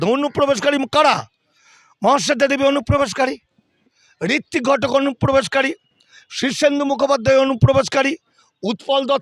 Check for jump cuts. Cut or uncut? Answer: uncut